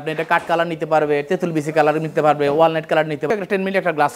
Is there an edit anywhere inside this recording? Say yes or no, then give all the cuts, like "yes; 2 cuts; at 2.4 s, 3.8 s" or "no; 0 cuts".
yes; 1 cut; at 3.2 s